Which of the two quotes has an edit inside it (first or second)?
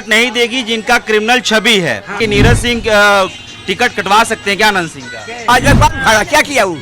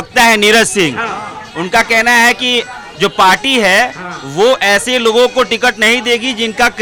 first